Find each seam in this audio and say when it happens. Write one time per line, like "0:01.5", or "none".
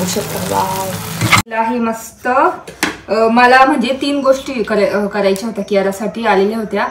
0:01.5